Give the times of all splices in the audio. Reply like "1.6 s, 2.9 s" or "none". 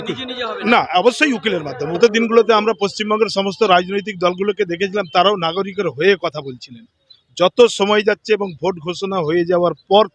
2.0 s